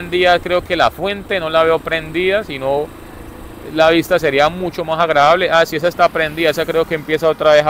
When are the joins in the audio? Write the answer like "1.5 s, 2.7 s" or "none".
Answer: none